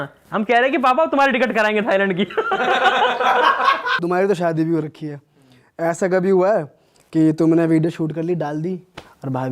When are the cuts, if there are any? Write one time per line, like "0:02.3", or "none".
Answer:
0:04.0

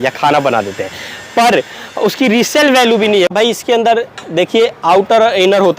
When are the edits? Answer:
0:03.3

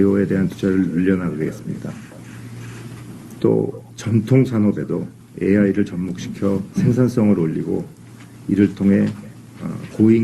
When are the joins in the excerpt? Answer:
0:02.3

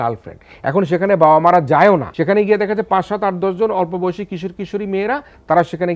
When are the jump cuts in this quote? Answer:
0:02.1

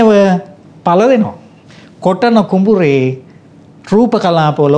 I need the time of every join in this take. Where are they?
none

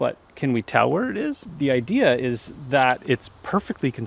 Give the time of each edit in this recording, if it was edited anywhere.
0:01.5

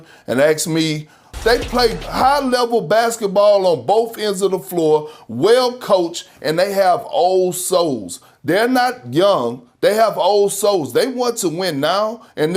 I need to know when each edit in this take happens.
0:01.3

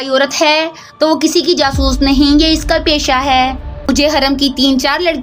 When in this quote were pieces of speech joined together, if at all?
0:03.9

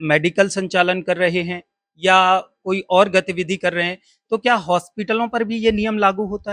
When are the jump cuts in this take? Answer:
none

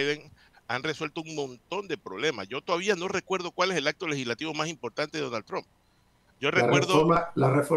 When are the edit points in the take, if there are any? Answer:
none

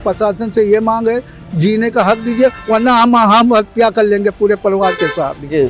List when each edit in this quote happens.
none

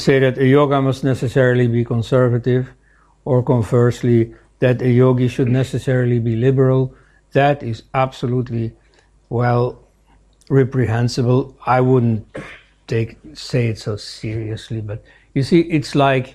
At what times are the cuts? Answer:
none

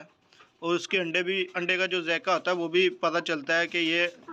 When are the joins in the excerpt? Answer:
none

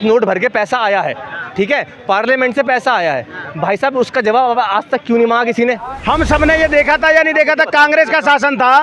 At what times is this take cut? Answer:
0:05.9

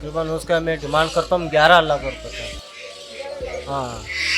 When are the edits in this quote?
none

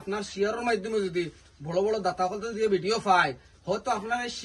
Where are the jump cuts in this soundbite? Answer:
none

